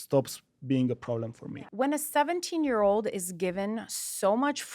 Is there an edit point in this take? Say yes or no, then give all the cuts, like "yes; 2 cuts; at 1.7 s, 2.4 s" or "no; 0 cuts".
yes; 1 cut; at 1.5 s